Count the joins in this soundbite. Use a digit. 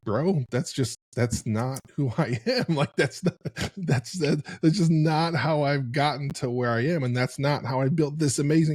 0